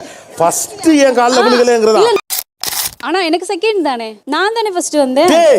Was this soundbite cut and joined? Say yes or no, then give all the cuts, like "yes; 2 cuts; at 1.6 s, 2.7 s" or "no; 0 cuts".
yes; 1 cut; at 2.8 s